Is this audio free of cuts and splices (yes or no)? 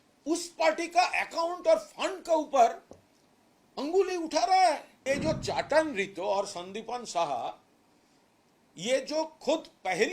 no